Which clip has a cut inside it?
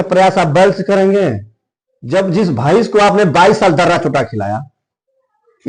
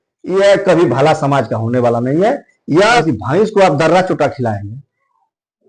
second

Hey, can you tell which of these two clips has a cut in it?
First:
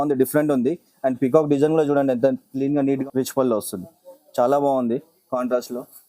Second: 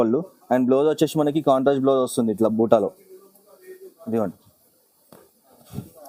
first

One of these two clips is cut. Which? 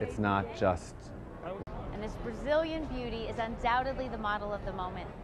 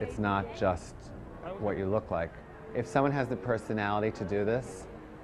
second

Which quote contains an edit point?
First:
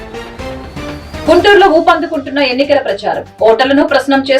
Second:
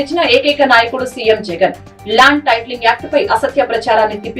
first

